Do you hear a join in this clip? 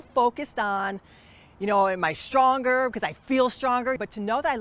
no; 0 cuts

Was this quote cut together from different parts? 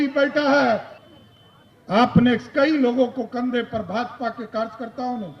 yes; 1 cut; at 0.9 s

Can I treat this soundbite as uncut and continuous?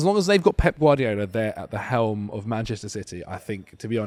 yes; 0 cuts

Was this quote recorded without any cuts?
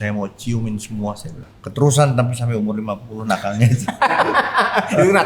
no; 1 cut; at 1.4 s

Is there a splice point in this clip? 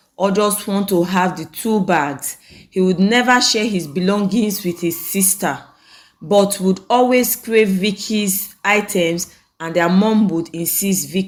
no; 0 cuts

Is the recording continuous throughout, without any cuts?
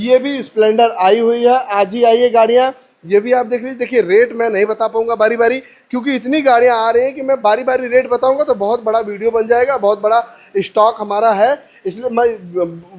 yes; 0 cuts

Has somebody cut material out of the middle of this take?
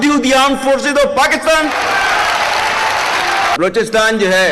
yes; 1 cut; at 3.6 s

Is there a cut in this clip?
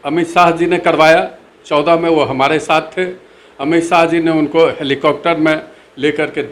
no; 0 cuts

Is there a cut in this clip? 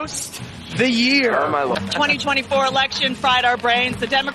yes; 1 cut; at 1.7 s

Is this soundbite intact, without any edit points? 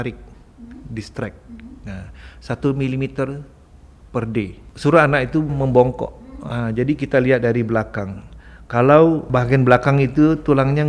no; 3 cuts; at 4.6 s, 5.5 s, 9.3 s

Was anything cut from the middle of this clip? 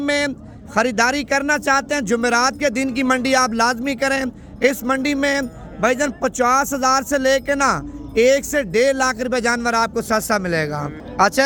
no; 0 cuts

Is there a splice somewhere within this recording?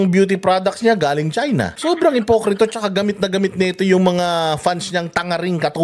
yes; 1 cut; at 1.7 s

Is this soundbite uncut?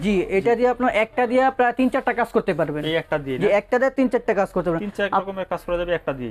yes; 0 cuts

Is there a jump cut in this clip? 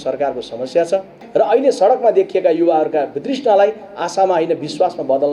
yes; 1 cut; at 1.1 s

